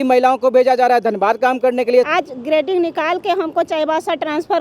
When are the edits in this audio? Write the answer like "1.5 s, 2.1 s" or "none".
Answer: 2.1 s